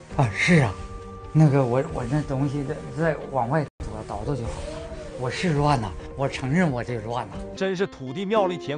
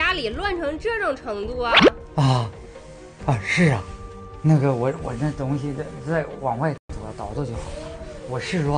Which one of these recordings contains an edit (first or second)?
first